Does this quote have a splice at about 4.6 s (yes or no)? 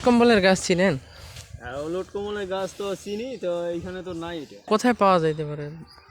yes